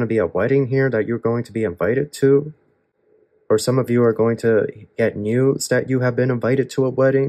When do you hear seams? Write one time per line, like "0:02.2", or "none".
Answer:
none